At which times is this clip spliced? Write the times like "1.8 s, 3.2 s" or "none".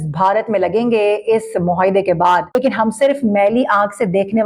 2.6 s